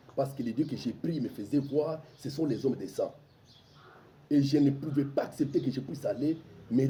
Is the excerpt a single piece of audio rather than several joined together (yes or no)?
yes